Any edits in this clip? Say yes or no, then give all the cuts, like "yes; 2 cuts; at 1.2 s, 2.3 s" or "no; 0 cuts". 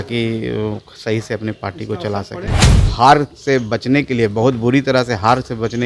yes; 1 cut; at 2.8 s